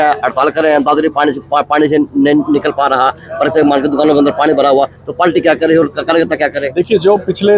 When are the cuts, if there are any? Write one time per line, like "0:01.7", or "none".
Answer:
none